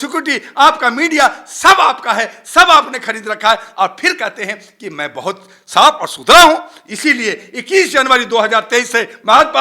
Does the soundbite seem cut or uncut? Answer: uncut